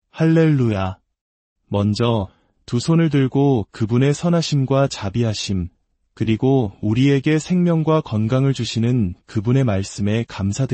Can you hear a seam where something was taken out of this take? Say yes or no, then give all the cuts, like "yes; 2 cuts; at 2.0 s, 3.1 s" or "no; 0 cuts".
yes; 1 cut; at 1.1 s